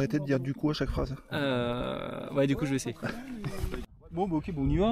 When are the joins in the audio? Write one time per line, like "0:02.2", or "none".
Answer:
none